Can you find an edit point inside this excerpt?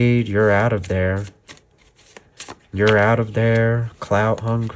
no; 0 cuts

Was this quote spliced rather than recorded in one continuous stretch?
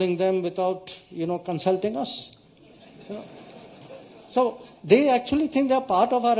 no; 0 cuts

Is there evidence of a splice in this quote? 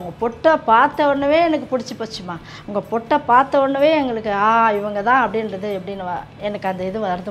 no; 0 cuts

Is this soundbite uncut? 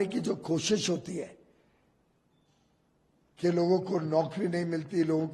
yes; 0 cuts

